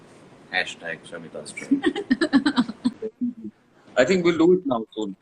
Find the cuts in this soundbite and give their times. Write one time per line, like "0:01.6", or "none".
0:03.1

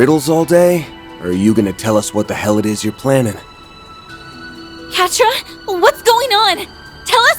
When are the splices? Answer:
0:03.4
0:04.9

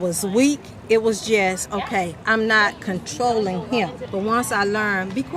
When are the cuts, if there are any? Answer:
0:04.0

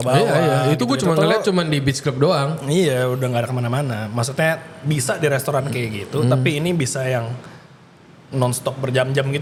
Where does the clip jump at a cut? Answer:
none

